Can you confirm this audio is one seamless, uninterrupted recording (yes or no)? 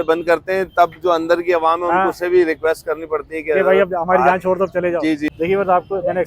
no